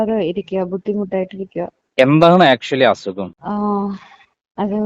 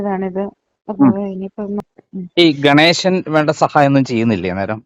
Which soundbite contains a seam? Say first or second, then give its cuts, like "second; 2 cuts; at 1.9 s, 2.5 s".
second; 1 cut; at 1.8 s